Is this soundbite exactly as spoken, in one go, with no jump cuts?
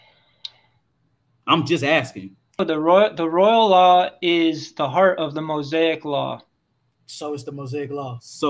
no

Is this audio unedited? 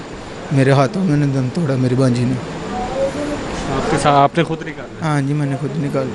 yes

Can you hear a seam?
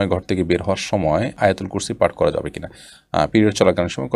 no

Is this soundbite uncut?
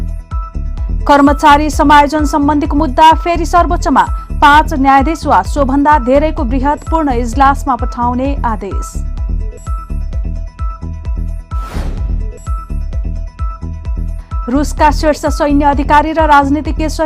no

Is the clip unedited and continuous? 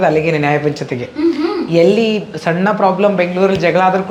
yes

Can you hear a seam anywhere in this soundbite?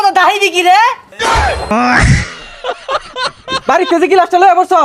yes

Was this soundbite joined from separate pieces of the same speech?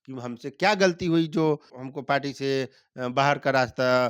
yes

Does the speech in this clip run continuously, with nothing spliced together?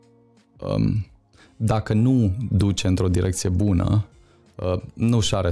yes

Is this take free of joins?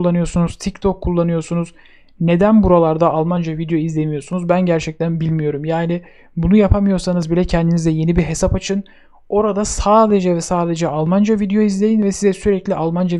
yes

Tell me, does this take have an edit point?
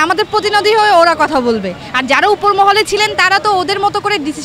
no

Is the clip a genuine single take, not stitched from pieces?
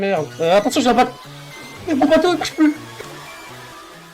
no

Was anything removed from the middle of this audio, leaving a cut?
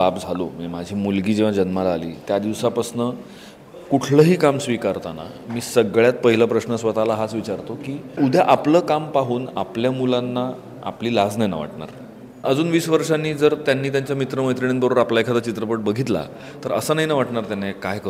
yes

